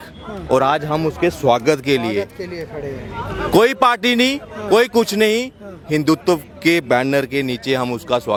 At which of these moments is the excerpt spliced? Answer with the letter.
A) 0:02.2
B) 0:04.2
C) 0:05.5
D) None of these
D